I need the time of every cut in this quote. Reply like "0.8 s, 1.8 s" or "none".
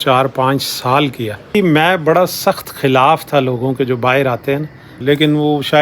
1.5 s, 4.9 s